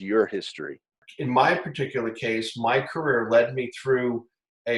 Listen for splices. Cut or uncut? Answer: cut